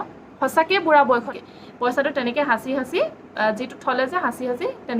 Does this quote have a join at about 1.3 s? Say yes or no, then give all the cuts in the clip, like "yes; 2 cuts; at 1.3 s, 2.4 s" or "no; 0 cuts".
yes; 1 cut; at 1.3 s